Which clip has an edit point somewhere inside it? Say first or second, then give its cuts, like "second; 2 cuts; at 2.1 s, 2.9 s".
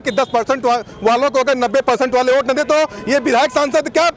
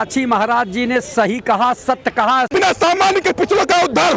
second; 1 cut; at 2.5 s